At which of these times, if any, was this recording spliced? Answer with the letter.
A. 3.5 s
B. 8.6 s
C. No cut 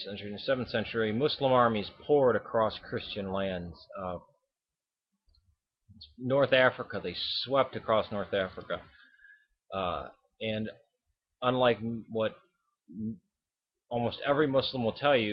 B